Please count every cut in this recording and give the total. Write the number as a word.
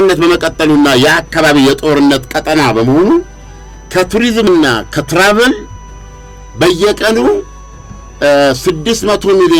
zero